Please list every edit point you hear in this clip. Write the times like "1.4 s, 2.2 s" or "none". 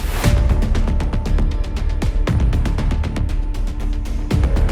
none